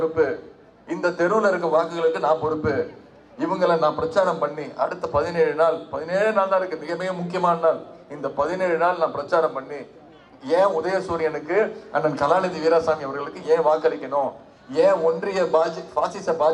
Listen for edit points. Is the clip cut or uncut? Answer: uncut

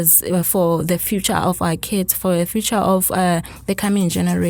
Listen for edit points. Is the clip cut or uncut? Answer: uncut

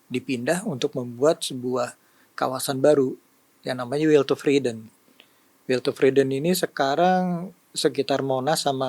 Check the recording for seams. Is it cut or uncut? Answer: uncut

